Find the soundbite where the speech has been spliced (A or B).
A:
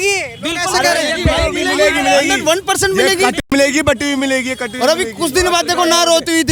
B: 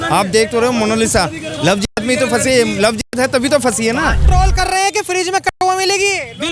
B